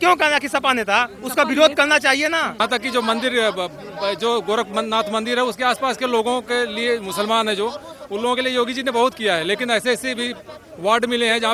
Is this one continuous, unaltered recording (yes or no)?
no